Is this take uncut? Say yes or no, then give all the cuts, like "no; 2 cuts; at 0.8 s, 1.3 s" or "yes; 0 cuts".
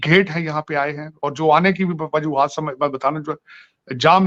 yes; 0 cuts